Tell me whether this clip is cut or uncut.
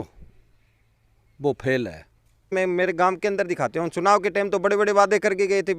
cut